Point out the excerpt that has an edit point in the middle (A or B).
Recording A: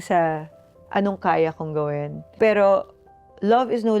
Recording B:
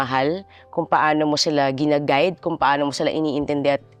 A